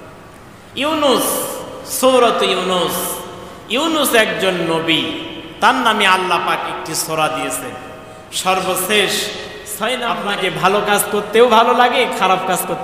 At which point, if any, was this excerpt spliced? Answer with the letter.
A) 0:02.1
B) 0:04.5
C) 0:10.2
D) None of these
C